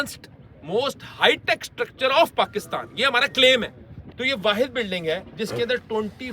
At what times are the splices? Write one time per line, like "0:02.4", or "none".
0:04.0